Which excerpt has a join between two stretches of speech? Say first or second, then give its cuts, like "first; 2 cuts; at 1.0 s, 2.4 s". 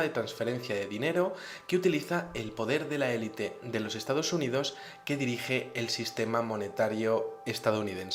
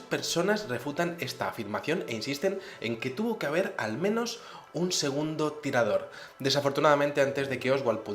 second; 1 cut; at 1.5 s